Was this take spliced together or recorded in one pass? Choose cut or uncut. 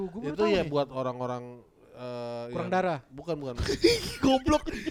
uncut